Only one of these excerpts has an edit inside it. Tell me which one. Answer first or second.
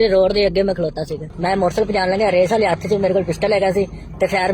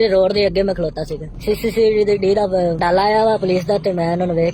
first